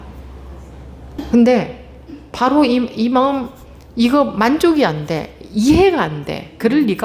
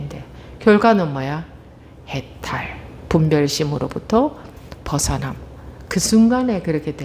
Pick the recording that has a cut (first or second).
first